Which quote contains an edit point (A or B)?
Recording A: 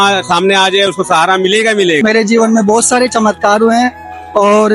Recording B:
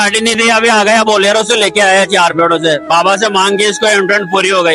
A